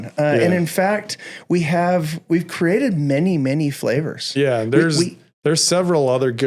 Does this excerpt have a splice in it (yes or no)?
no